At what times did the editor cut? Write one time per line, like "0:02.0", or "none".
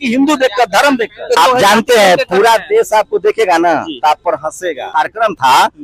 0:01.4
0:04.9